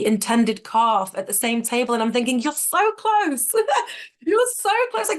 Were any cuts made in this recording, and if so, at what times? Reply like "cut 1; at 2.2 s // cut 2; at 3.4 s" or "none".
none